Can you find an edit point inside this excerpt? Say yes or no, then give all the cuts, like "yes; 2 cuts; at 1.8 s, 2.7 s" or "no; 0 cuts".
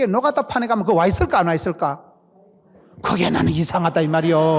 no; 0 cuts